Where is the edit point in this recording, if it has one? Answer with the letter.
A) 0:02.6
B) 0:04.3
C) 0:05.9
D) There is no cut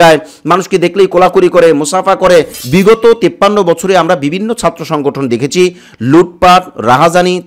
A